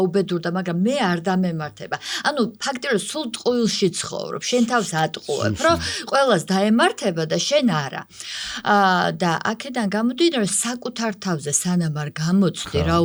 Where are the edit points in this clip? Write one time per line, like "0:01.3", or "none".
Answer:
none